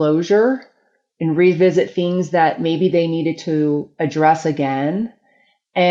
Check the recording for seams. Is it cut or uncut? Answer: uncut